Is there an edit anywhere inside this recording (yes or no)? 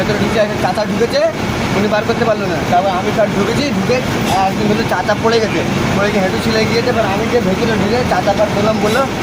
no